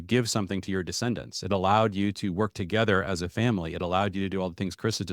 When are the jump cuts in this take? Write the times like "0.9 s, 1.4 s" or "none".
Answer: none

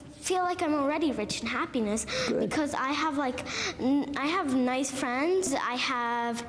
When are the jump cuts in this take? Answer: 5.5 s

